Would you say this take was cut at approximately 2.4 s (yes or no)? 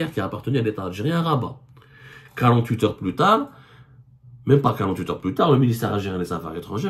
no